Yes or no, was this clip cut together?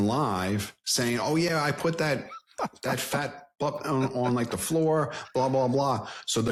no